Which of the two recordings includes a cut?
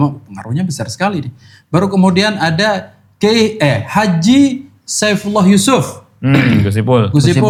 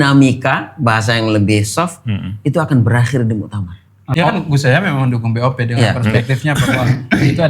second; 1 cut; at 4.1 s

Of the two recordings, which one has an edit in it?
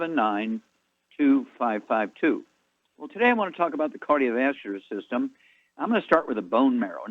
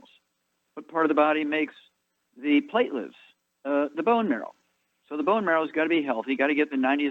second; 1 cut; at 6.2 s

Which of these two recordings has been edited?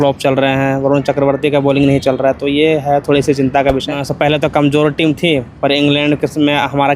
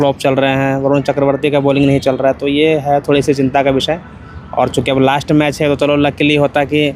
first; 1 cut; at 4.0 s

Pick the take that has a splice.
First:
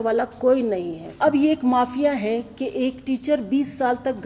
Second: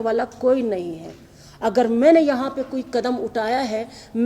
first; 1 cut; at 1.2 s

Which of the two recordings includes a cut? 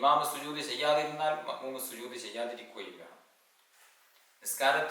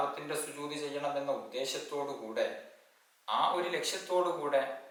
first; 1 cut; at 3.7 s

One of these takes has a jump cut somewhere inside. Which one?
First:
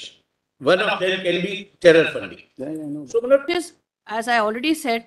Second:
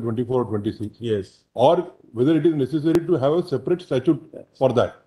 first; 1 cut; at 3.5 s

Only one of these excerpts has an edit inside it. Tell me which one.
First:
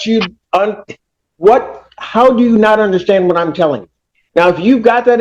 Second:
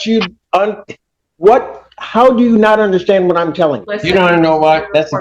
second; 1 cut; at 3.9 s

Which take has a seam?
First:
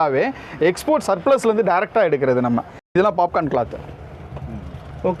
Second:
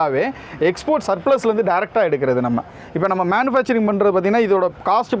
first; 1 cut; at 2.9 s

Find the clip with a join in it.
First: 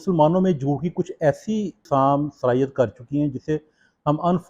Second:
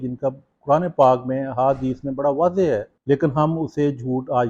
second; 1 cut; at 2.9 s

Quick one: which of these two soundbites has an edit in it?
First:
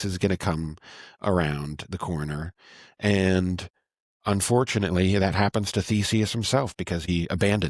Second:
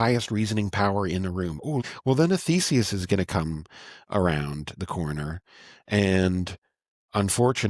second; 1 cut; at 1.8 s

